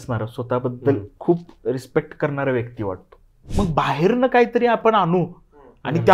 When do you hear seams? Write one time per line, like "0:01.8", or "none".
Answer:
0:03.4